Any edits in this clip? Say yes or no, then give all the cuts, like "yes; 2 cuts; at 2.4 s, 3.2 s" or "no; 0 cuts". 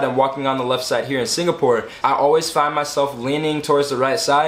yes; 1 cut; at 1.9 s